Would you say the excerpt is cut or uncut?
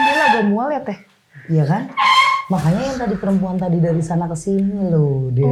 uncut